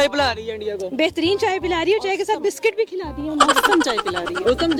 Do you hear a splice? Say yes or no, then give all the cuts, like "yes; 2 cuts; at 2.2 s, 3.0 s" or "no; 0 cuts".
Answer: no; 0 cuts